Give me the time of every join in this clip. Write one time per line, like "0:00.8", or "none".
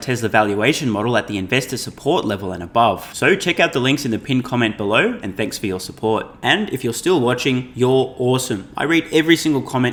none